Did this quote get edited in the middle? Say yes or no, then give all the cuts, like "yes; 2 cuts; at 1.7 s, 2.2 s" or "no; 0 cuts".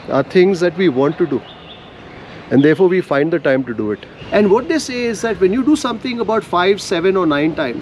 yes; 1 cut; at 4.1 s